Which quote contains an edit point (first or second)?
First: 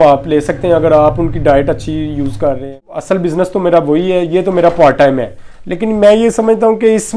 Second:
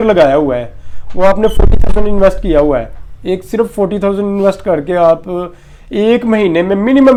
first